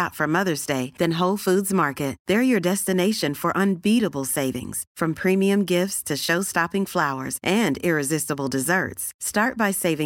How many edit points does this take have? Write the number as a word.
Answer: zero